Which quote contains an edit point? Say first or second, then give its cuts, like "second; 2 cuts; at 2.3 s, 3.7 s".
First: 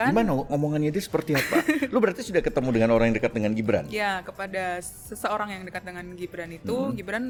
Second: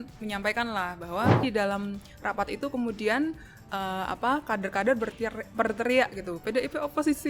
second; 1 cut; at 1.4 s